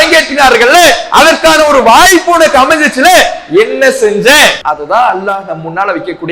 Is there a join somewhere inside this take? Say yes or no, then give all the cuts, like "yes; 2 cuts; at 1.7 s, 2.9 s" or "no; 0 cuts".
yes; 1 cut; at 4.6 s